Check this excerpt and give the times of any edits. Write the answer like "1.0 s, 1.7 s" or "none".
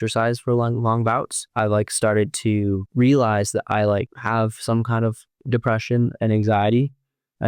1.4 s, 2.9 s, 4.2 s, 5.3 s